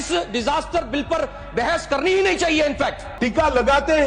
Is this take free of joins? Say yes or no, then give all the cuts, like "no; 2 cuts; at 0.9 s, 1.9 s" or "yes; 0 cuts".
no; 1 cut; at 3.1 s